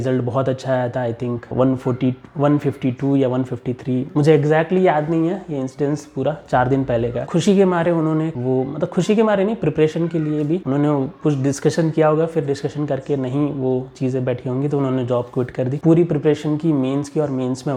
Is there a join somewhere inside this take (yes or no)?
no